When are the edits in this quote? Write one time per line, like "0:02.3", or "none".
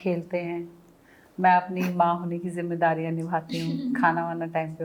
none